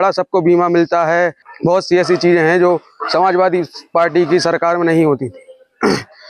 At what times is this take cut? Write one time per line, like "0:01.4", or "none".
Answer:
0:01.4